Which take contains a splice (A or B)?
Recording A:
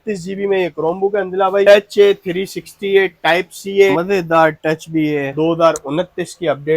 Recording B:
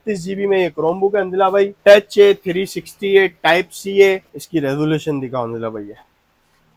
A